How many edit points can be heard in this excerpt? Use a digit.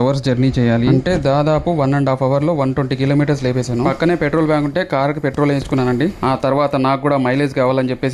0